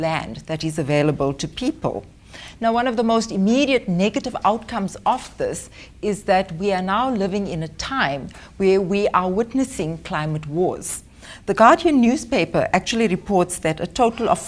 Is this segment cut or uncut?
cut